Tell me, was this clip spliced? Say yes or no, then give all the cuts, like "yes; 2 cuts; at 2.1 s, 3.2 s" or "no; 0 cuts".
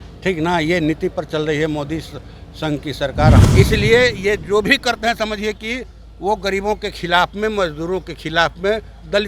yes; 1 cut; at 3.5 s